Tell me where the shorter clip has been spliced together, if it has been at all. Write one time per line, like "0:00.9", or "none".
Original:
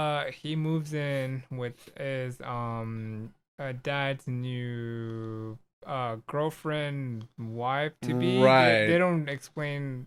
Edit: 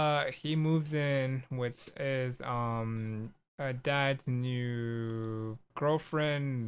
0:05.7